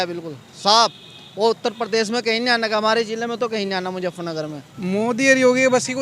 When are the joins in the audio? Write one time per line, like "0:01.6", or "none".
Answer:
0:04.7